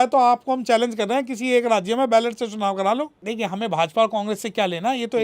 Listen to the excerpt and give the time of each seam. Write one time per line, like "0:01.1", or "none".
0:03.2